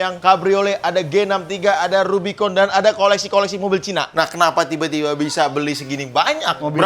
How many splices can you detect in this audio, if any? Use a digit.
1